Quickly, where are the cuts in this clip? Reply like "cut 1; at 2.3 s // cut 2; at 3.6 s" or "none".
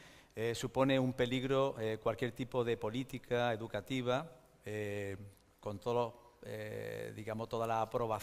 cut 1; at 1.3 s